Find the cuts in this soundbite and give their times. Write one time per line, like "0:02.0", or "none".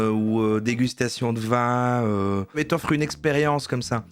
0:02.5